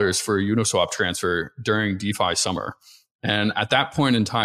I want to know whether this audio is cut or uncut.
uncut